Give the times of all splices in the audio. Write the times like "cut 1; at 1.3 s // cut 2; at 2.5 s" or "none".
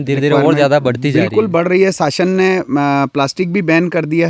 none